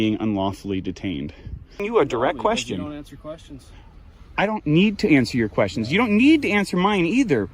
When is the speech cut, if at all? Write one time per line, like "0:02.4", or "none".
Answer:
0:01.8